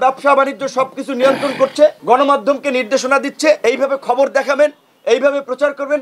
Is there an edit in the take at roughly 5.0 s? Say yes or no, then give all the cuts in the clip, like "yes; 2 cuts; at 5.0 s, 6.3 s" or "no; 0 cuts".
no; 2 cuts; at 2.0 s, 3.6 s